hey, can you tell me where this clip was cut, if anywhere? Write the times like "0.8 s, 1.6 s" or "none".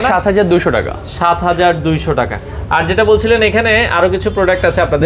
none